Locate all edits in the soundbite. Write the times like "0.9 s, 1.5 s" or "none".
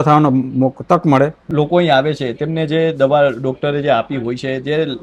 1.5 s